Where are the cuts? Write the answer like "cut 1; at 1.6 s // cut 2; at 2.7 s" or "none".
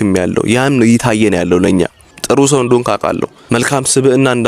cut 1; at 2.1 s // cut 2; at 3.3 s